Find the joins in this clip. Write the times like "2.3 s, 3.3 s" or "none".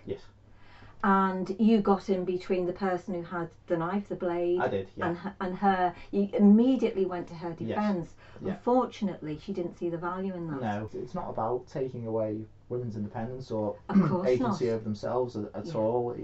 10.9 s